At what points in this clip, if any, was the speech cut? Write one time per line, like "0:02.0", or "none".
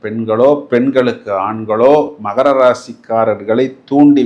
none